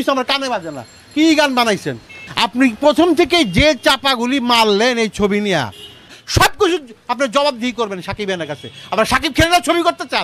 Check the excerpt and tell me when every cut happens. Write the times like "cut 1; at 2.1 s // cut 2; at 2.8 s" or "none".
cut 1; at 2.2 s // cut 2; at 6.2 s